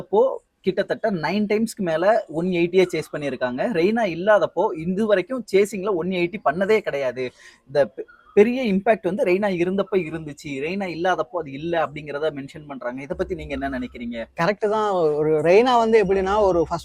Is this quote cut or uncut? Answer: uncut